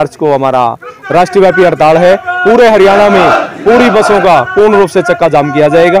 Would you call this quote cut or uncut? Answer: uncut